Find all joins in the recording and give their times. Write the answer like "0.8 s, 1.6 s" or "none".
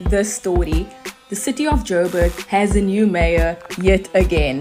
none

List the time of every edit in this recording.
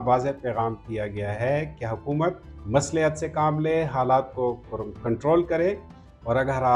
2.5 s

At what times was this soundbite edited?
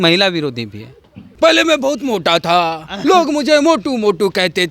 1.2 s

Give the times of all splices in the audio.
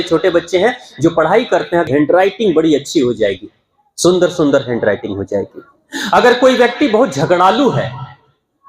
1.9 s

